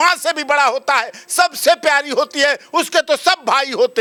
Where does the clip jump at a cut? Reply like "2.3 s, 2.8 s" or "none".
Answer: none